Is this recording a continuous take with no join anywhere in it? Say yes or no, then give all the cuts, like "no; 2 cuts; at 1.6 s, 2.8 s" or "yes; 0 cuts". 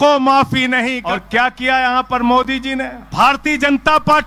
no; 2 cuts; at 1.0 s, 3.0 s